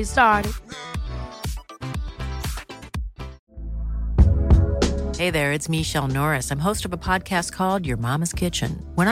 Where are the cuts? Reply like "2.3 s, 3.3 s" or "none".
3.4 s